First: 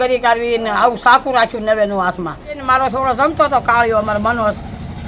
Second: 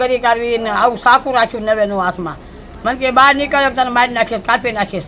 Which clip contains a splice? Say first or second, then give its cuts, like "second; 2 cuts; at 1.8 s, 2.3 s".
first; 1 cut; at 2.6 s